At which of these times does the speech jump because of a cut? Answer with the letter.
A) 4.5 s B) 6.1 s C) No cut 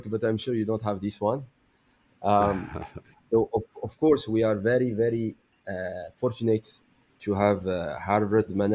C